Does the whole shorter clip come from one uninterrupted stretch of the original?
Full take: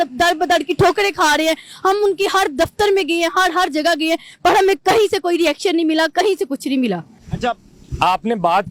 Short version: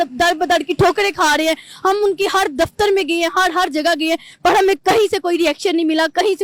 yes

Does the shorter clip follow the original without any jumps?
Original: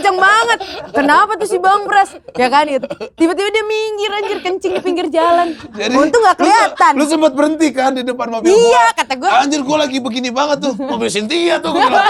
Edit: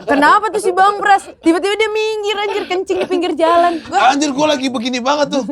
no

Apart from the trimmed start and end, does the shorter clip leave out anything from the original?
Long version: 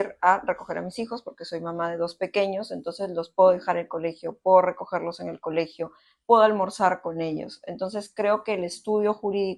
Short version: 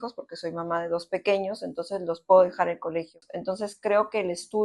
yes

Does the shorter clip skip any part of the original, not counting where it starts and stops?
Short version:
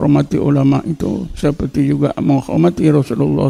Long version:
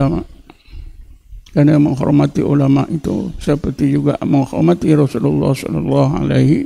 no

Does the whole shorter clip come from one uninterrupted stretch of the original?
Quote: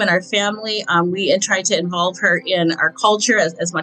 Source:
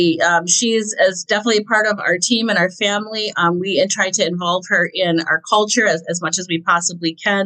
yes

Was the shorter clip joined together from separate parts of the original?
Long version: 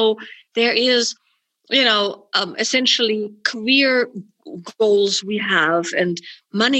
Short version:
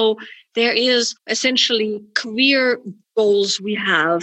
yes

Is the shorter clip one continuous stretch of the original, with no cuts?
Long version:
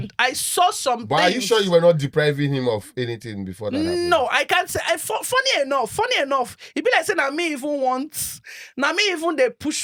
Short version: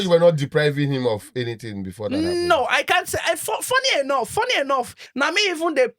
no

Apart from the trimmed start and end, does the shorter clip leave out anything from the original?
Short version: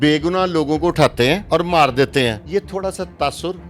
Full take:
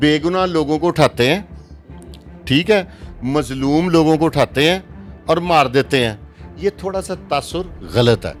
yes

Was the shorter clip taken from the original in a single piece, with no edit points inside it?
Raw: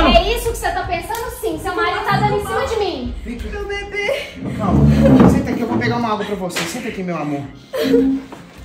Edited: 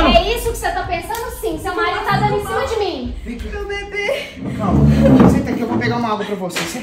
yes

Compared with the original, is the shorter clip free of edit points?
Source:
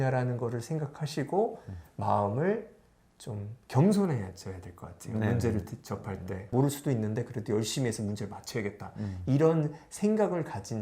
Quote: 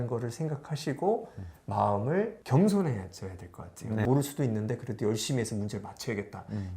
no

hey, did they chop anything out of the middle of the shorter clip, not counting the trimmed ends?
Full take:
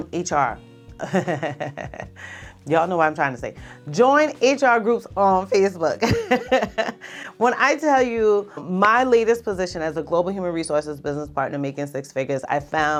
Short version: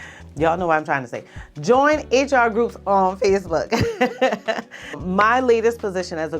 yes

